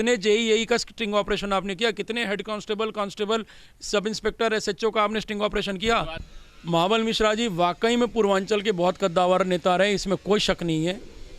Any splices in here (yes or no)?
yes